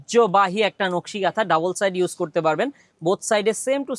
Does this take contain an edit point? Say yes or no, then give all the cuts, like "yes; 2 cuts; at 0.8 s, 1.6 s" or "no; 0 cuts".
no; 0 cuts